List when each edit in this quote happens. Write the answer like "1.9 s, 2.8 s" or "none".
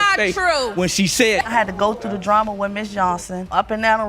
1.5 s